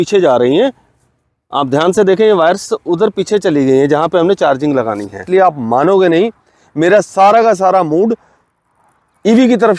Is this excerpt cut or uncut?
cut